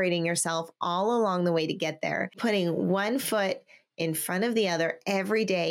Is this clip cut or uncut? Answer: cut